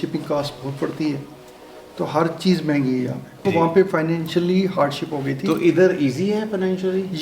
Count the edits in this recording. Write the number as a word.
one